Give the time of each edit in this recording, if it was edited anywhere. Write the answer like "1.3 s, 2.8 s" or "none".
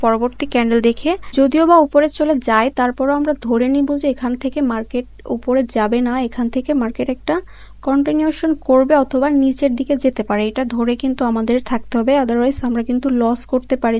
1.2 s